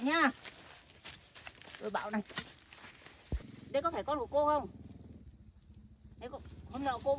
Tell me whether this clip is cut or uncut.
uncut